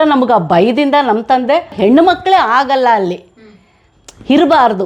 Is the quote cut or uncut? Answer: cut